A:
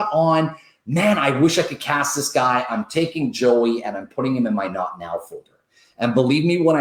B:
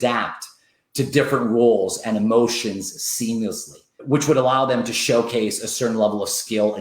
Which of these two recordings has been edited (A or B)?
B